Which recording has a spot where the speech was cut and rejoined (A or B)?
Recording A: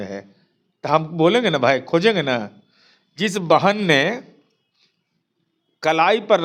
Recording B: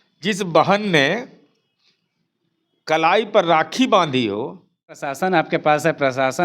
B